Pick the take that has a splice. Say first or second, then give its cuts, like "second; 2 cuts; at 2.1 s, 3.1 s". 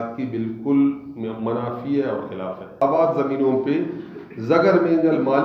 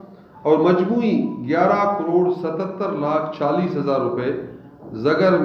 first; 1 cut; at 2.8 s